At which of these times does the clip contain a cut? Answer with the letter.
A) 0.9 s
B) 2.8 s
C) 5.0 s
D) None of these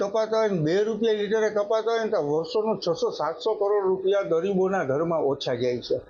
D